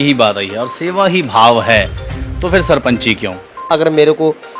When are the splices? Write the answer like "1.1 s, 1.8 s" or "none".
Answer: 3.6 s